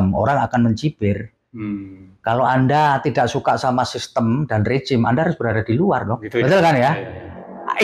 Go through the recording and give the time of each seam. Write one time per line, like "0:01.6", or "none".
none